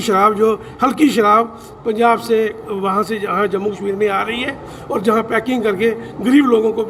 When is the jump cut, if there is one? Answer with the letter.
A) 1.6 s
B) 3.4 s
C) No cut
C